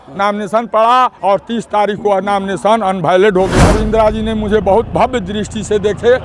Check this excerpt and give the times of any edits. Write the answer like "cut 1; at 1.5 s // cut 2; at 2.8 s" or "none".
cut 1; at 3.6 s